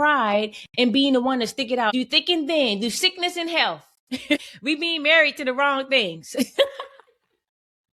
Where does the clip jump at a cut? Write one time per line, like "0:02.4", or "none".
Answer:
0:01.9
0:04.4